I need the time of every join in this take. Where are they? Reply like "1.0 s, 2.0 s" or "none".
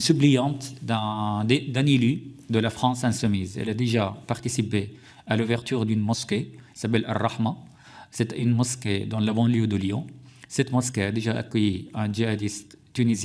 none